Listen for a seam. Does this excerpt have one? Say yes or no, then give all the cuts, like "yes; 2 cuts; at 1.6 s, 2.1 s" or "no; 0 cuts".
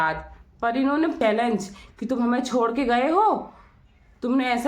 yes; 1 cut; at 1.2 s